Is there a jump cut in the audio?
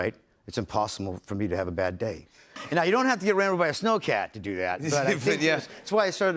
yes; 1 cut; at 2.5 s

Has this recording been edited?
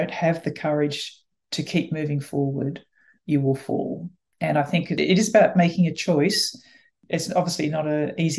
yes; 2 cuts; at 4.6 s, 7.0 s

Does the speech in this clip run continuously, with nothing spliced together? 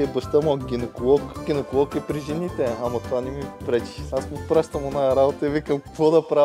yes; 0 cuts

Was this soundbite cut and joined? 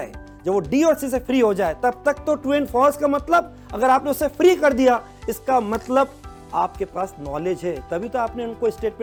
no; 0 cuts

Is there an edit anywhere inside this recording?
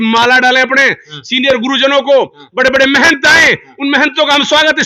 no; 0 cuts

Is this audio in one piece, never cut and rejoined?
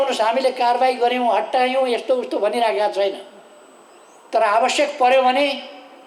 yes; 0 cuts

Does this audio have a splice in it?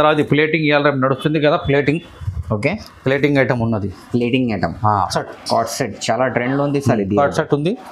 yes; 1 cut; at 5.1 s

